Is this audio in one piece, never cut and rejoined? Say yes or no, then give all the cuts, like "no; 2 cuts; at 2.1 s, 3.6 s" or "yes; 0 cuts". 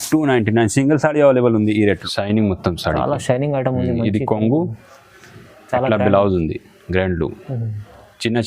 no; 1 cut; at 1.9 s